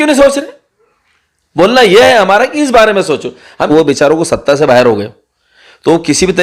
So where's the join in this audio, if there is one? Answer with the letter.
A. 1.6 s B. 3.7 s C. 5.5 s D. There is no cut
B